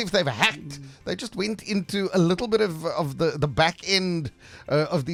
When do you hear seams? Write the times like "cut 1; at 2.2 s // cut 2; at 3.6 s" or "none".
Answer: none